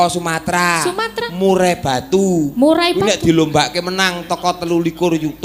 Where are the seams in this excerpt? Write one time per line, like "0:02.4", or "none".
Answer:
none

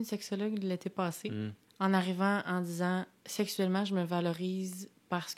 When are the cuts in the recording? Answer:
0:01.6
0:03.2

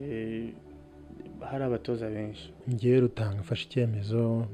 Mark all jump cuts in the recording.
0:02.7

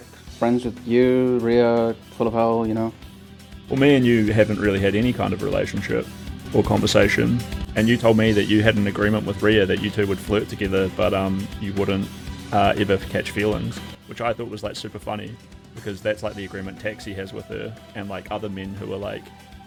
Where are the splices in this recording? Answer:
none

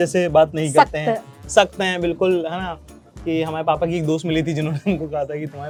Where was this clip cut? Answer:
none

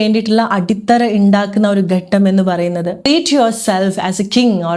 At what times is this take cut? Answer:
0:03.1

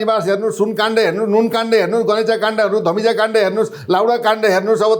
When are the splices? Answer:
none

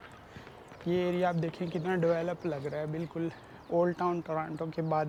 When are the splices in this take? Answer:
none

